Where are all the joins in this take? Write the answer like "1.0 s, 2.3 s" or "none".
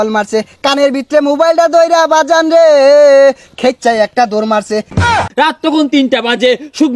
5.2 s